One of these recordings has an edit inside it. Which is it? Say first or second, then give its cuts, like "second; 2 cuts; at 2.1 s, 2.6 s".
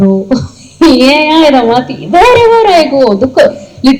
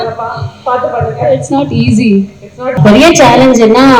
second; 1 cut; at 2.8 s